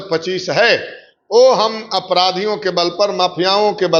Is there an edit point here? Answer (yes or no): no